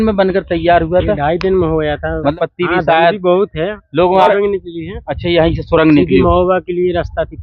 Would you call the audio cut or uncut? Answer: cut